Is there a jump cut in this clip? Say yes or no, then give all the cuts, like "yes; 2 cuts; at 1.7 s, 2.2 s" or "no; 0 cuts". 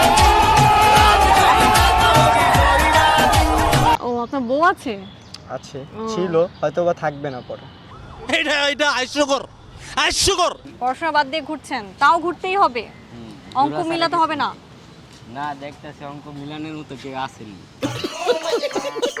yes; 2 cuts; at 4.0 s, 10.6 s